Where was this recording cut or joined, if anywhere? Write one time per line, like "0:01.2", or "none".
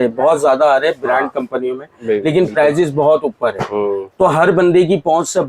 none